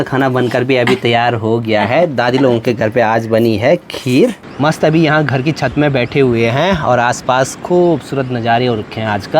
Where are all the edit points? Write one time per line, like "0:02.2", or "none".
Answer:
0:04.4